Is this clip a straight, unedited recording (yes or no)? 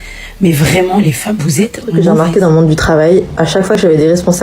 no